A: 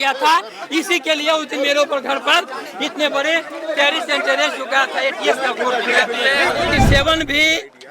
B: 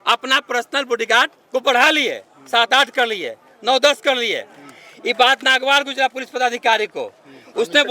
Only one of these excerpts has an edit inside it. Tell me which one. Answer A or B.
A